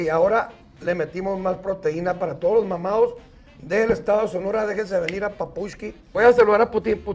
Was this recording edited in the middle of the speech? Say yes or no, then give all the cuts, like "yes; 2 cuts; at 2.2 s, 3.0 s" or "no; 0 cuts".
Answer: yes; 1 cut; at 6.0 s